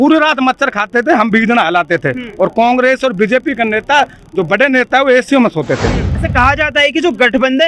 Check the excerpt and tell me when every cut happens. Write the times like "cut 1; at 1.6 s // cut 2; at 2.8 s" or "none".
cut 1; at 6.0 s